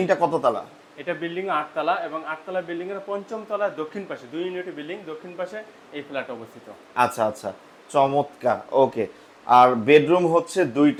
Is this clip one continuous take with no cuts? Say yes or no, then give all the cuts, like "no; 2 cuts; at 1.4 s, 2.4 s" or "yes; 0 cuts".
yes; 0 cuts